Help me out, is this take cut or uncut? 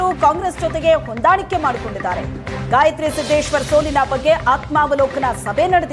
uncut